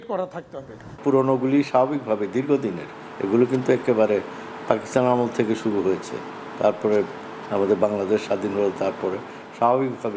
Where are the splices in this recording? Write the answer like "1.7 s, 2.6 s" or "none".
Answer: 1.0 s